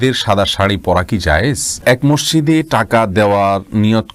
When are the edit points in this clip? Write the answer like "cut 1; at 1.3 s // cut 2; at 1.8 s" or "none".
cut 1; at 1.8 s